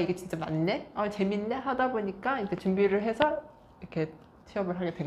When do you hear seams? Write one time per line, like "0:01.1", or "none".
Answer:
none